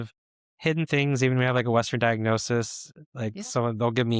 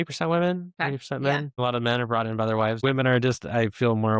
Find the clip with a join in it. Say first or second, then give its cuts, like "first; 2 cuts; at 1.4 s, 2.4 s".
second; 2 cuts; at 1.5 s, 2.8 s